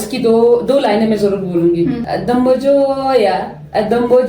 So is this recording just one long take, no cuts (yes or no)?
no